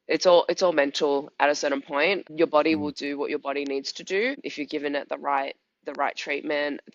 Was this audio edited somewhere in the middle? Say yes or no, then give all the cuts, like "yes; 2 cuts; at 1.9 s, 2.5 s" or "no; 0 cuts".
yes; 2 cuts; at 2.3 s, 4.5 s